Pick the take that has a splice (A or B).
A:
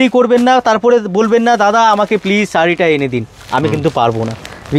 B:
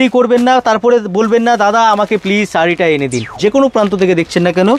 B